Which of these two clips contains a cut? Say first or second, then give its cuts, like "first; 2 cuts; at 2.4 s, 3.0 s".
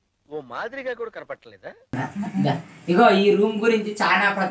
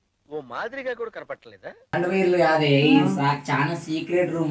second; 1 cut; at 1.9 s